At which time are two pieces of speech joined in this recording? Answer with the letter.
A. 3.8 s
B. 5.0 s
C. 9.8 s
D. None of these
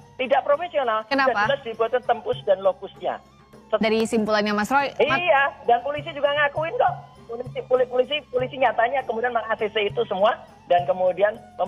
A